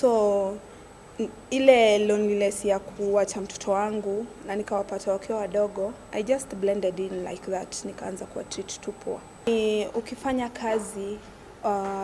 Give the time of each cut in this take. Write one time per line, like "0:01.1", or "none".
0:09.5